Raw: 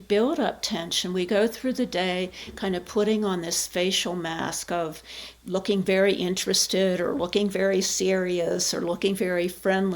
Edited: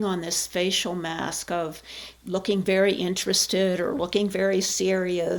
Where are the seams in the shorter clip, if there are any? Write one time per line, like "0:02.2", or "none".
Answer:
none